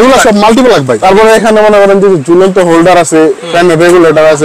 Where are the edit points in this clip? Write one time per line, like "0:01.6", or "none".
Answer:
0:01.0